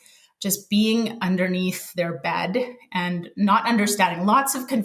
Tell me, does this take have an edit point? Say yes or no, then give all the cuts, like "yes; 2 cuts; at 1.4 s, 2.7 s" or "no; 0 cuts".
no; 0 cuts